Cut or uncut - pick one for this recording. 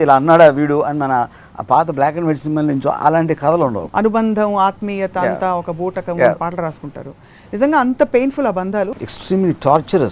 cut